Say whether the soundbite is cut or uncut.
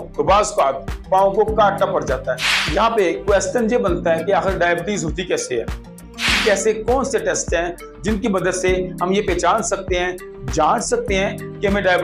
cut